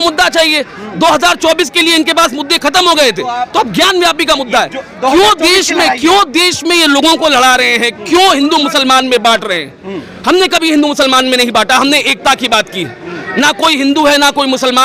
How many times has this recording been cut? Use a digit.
0